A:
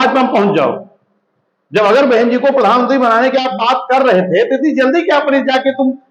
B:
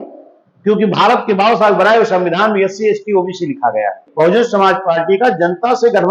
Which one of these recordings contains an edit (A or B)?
B